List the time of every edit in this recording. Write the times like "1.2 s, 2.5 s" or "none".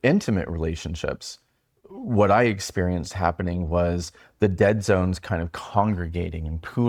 none